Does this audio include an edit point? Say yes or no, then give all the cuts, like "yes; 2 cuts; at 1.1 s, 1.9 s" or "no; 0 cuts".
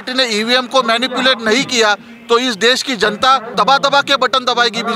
yes; 1 cut; at 3.5 s